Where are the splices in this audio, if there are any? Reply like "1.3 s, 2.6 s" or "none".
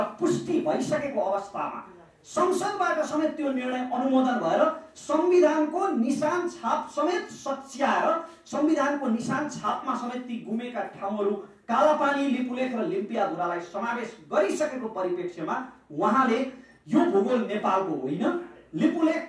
none

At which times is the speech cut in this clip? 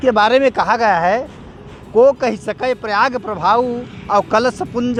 none

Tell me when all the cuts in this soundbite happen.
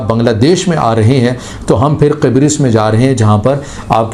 none

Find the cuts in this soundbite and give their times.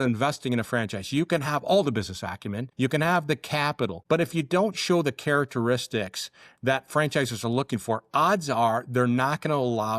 2.6 s, 4.0 s

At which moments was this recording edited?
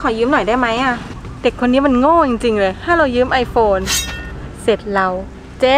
1.2 s

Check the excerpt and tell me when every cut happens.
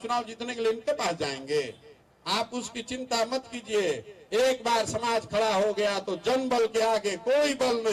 none

